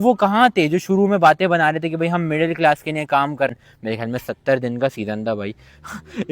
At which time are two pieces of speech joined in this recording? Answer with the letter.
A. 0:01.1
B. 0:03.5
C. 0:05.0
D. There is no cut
B